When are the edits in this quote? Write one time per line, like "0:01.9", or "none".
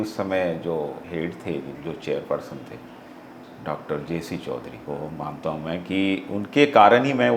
0:01.0
0:04.8